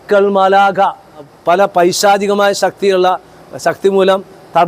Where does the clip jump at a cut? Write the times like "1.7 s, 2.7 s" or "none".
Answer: 1.3 s